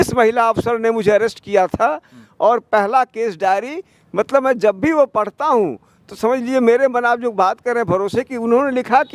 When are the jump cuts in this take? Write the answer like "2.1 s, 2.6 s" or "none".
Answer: none